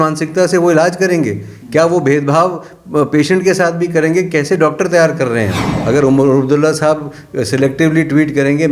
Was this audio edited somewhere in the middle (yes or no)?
yes